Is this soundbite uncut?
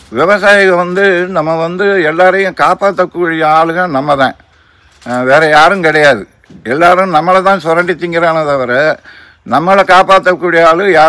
yes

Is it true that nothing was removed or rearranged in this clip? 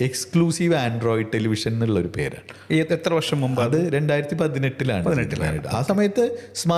yes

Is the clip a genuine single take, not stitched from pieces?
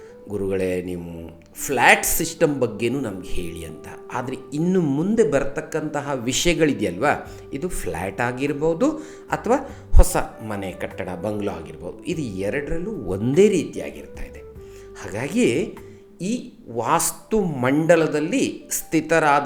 yes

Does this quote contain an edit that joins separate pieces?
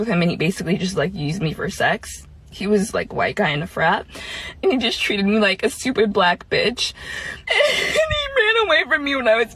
yes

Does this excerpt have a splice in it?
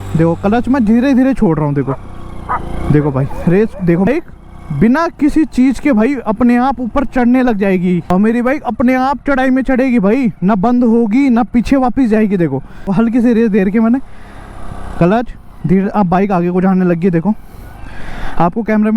yes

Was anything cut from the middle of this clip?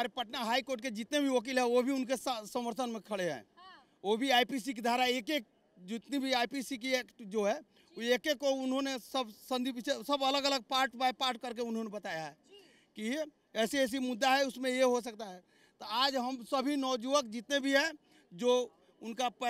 no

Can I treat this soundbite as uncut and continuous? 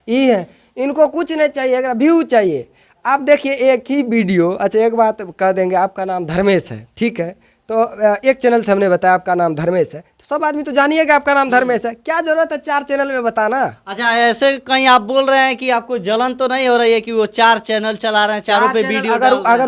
yes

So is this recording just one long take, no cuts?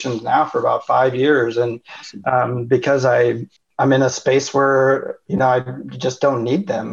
no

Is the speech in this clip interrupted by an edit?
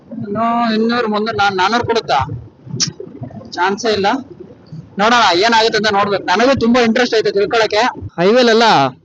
yes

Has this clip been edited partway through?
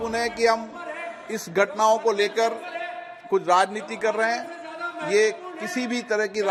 no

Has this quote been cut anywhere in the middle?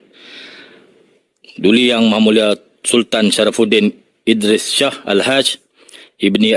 no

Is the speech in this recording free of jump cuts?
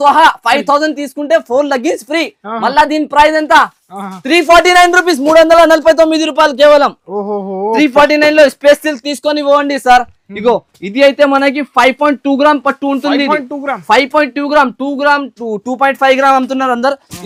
yes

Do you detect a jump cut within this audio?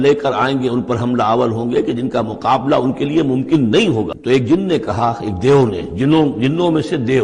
yes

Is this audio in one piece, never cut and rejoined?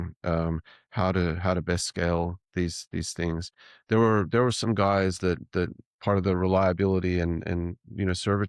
no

